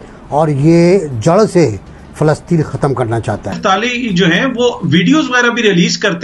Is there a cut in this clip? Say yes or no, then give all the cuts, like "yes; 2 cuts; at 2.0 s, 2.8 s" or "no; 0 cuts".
yes; 1 cut; at 3.6 s